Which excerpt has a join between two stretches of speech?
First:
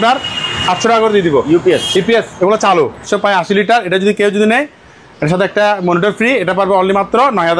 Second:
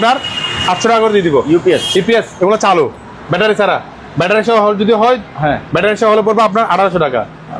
first; 1 cut; at 3.0 s

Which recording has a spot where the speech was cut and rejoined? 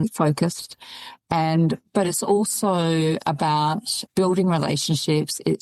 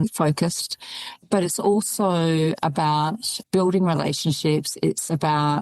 second; 1 cut; at 1.2 s

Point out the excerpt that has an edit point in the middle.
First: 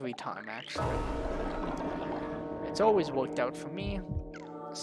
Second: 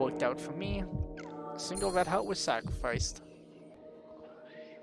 second; 1 cut; at 3.8 s

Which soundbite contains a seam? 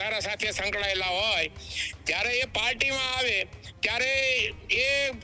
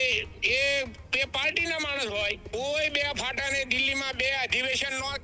second; 1 cut; at 2.4 s

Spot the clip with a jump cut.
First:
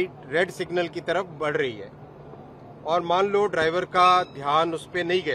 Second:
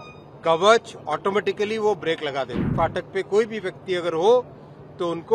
second; 1 cut; at 2.7 s

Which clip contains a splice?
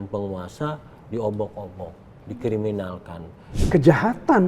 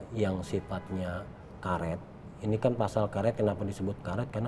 first; 1 cut; at 3.5 s

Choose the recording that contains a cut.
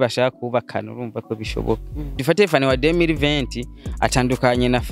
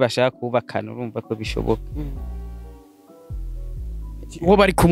first; 1 cut; at 2.2 s

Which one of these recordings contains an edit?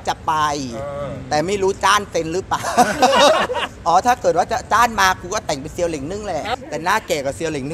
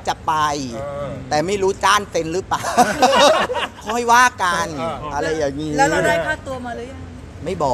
first; 2 cuts; at 3.7 s, 6.5 s

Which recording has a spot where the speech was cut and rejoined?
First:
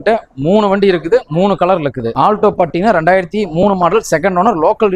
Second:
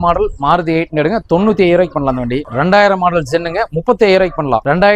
first; 1 cut; at 2.1 s

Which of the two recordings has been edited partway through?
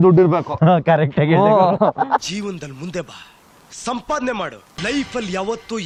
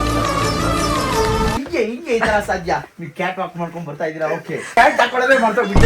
second; 3 cuts; at 1.6 s, 2.9 s, 4.7 s

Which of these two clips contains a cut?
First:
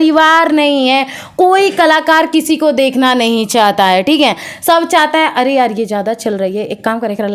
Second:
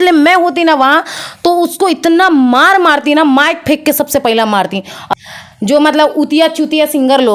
second; 1 cut; at 5.2 s

